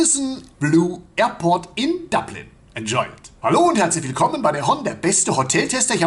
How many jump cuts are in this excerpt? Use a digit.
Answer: 1